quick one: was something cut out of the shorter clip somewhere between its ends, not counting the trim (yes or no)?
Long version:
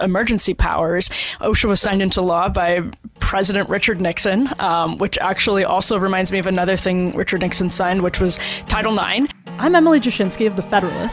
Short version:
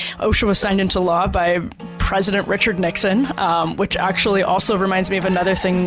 no